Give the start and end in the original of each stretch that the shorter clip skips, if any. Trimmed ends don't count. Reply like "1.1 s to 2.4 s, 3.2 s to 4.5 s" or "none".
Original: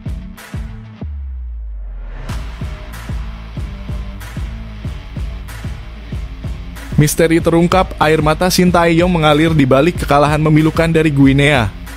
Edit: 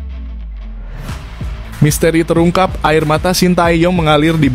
3.0 s to 7.0 s